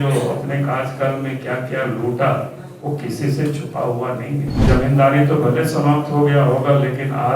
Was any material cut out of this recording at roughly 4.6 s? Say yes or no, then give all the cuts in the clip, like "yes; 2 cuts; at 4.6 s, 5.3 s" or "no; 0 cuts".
yes; 1 cut; at 4.6 s